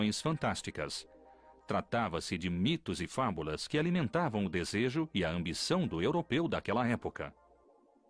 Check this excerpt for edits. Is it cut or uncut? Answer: cut